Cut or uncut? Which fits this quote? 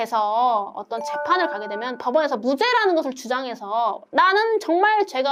uncut